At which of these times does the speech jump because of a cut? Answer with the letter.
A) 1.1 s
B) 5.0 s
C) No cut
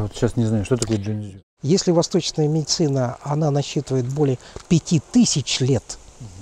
A